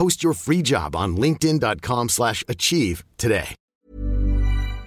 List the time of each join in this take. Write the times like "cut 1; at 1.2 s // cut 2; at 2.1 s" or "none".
cut 1; at 3.6 s